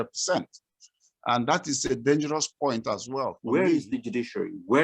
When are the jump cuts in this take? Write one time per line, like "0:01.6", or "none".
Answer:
0:03.4